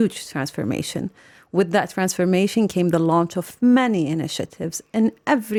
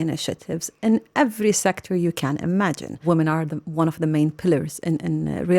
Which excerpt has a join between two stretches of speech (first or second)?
second